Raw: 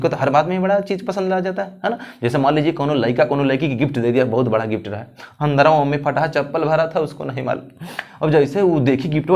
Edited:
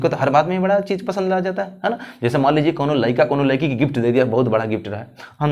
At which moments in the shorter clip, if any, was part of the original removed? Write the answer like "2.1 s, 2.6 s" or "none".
none